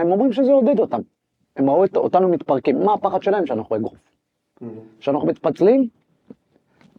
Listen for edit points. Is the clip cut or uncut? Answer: uncut